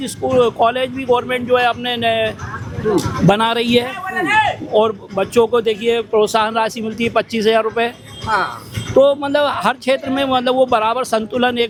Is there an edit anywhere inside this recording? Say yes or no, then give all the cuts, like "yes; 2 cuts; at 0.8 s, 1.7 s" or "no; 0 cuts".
no; 0 cuts